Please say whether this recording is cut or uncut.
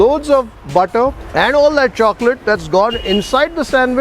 cut